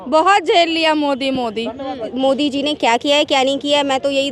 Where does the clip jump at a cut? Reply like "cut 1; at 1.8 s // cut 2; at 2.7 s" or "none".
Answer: cut 1; at 2.1 s